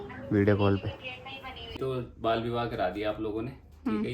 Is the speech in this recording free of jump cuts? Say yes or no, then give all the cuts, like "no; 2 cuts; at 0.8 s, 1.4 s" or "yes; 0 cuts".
no; 1 cut; at 1.7 s